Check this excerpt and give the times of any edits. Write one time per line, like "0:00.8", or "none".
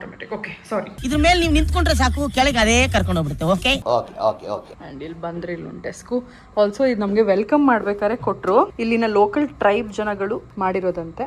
none